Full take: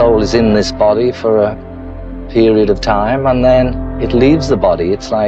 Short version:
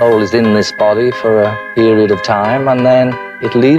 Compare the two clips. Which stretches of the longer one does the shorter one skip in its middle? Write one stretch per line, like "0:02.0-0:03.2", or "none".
0:01.6-0:02.2